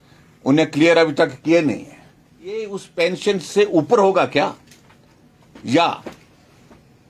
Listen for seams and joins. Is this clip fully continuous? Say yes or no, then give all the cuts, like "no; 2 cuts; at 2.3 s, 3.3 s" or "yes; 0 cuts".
no; 1 cut; at 2.5 s